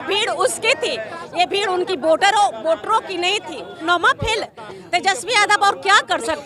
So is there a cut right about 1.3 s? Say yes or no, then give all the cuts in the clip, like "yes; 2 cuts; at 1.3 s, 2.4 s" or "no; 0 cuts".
no; 1 cut; at 3.8 s